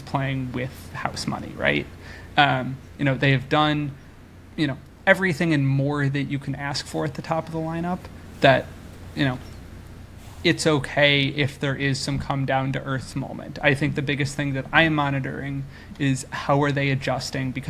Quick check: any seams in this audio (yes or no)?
no